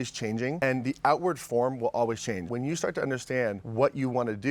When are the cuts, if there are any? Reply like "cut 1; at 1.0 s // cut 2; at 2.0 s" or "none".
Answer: cut 1; at 2.5 s